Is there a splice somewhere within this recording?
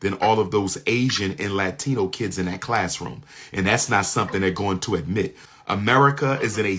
yes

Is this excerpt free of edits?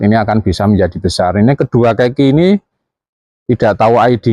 yes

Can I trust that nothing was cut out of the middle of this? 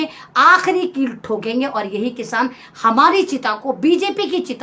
yes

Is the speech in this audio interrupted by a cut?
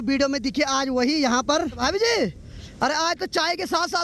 yes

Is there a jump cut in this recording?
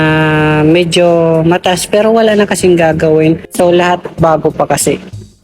yes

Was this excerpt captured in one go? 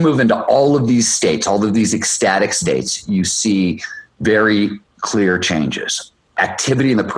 yes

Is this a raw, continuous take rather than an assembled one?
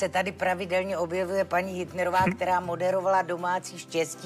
yes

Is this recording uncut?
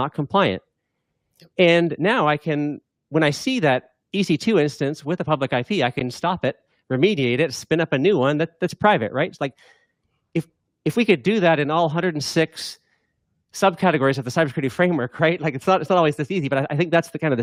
yes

